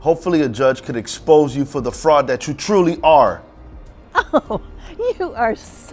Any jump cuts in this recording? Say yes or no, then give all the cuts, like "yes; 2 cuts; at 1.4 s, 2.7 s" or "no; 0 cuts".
no; 0 cuts